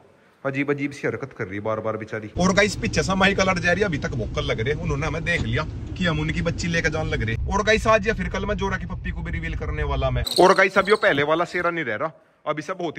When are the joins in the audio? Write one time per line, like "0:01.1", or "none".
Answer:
0:02.3
0:07.4
0:10.2